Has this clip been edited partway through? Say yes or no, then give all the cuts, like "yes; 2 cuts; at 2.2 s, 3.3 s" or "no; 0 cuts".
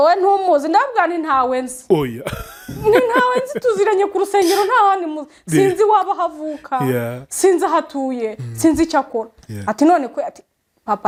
no; 0 cuts